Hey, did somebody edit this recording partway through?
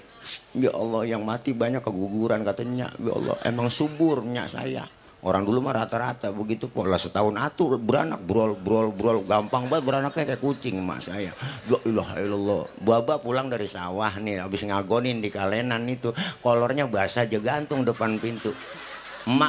no; 0 cuts

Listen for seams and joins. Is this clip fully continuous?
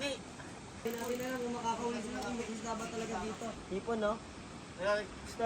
no; 2 cuts; at 0.8 s, 3.6 s

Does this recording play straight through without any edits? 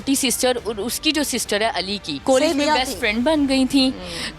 no; 1 cut; at 2.1 s

